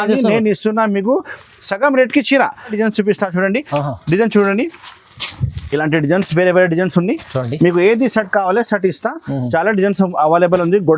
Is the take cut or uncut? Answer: cut